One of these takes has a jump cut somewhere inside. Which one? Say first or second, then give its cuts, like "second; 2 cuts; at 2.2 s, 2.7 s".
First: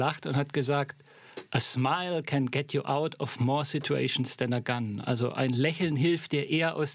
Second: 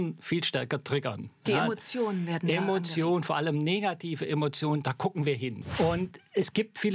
second; 1 cut; at 5.6 s